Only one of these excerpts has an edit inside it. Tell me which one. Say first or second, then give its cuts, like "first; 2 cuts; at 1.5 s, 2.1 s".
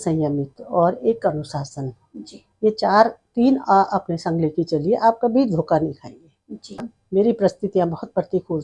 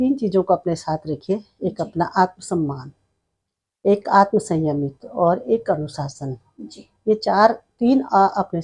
first; 1 cut; at 6.9 s